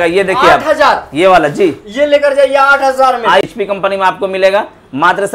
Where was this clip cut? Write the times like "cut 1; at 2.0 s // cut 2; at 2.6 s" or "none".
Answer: cut 1; at 3.4 s